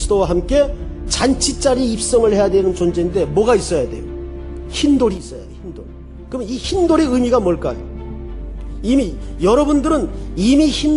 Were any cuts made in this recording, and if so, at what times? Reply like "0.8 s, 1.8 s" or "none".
1.5 s